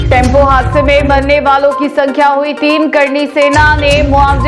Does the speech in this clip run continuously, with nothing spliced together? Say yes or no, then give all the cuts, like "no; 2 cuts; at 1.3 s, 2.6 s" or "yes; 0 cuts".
yes; 0 cuts